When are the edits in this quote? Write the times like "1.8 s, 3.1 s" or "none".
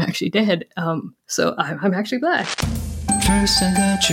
2.5 s